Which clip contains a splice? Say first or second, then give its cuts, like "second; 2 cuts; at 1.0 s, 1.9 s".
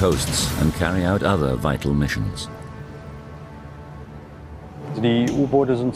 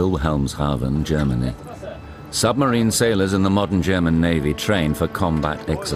first; 1 cut; at 1.0 s